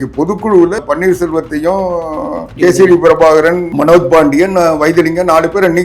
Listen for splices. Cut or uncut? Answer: cut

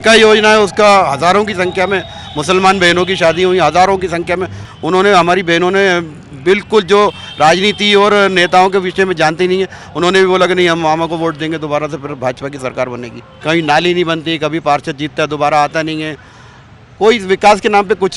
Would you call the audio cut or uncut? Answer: cut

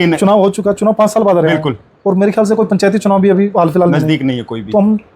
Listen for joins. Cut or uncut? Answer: uncut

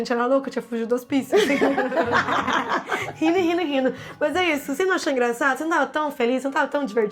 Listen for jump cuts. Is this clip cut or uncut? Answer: uncut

